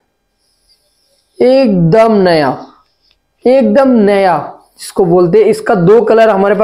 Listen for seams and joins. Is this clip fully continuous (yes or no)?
yes